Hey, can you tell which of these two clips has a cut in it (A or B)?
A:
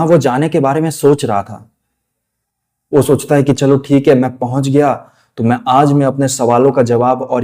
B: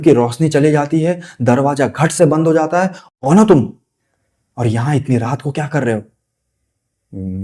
B